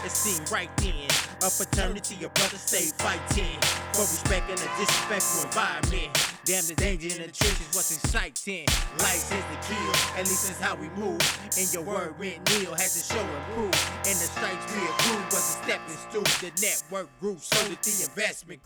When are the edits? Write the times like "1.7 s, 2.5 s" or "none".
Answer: none